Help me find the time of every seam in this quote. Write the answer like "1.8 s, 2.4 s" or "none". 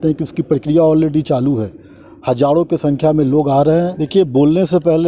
4.0 s